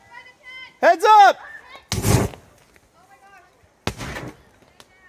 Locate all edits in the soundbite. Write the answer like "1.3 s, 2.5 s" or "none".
3.6 s